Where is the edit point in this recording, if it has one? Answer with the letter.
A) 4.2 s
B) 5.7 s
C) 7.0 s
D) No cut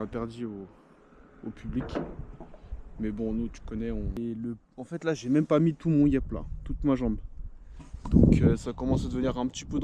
A